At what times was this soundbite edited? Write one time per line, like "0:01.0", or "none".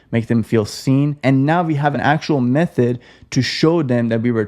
0:01.1
0:02.0